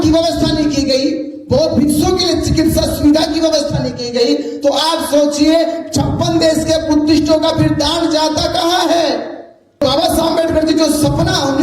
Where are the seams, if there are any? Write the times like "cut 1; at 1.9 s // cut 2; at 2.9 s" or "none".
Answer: cut 1; at 9.8 s